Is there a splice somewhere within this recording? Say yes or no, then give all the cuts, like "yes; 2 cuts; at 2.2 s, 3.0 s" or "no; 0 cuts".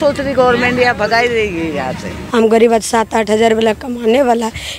yes; 1 cut; at 2.1 s